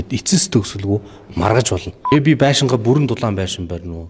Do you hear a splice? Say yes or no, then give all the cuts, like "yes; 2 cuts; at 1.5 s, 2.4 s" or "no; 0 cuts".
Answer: yes; 1 cut; at 1.9 s